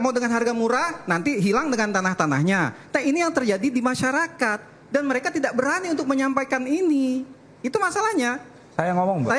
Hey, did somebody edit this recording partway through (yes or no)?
no